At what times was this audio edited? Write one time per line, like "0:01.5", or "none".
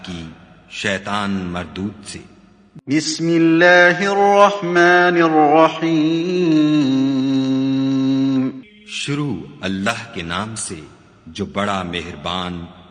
none